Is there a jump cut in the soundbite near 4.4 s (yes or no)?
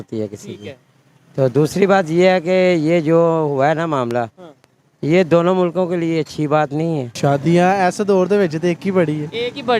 no